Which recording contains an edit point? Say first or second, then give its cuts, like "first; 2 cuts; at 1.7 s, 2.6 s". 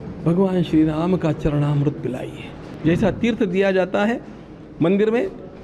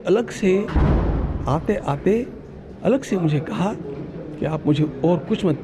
first; 1 cut; at 2.7 s